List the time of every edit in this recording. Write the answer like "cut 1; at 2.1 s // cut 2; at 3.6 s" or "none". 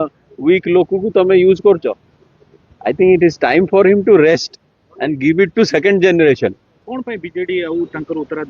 none